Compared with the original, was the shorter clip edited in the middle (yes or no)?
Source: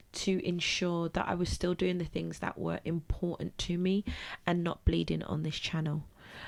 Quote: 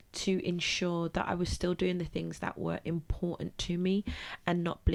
no